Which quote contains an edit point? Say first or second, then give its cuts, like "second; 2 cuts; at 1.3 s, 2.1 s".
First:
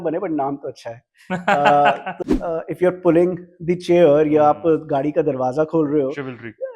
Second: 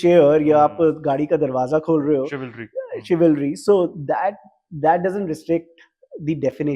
first; 1 cut; at 2.1 s